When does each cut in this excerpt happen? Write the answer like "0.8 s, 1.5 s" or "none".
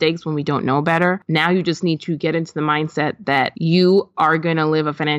1.2 s, 3.5 s